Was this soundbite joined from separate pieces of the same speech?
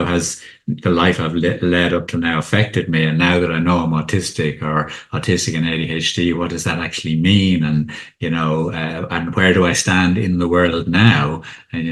no; 0 cuts

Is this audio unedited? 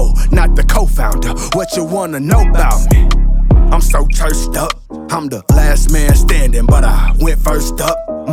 yes; 0 cuts

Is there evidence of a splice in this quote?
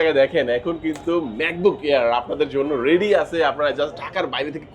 no; 0 cuts

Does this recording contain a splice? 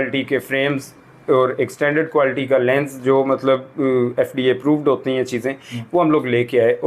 no; 0 cuts

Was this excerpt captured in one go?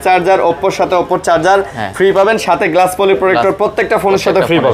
yes; 0 cuts

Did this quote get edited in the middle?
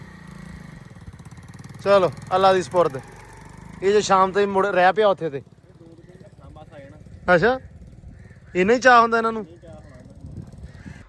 no; 0 cuts

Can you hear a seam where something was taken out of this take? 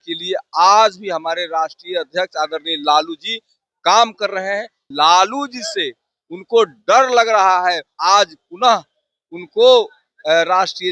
yes; 2 cuts; at 4.9 s, 7.9 s

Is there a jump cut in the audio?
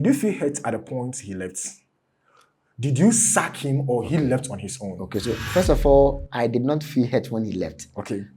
no; 0 cuts

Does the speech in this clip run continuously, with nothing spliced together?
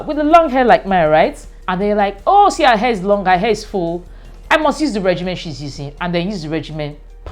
yes; 0 cuts

